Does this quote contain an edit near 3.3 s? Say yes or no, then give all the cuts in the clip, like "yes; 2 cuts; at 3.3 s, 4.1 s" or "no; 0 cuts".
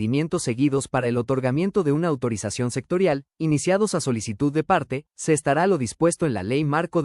no; 0 cuts